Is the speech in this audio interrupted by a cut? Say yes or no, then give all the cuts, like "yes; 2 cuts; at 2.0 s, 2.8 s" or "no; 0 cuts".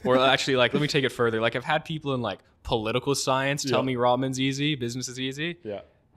no; 0 cuts